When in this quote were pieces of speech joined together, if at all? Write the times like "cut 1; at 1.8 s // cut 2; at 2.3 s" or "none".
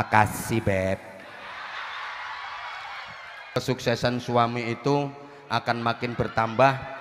cut 1; at 3.3 s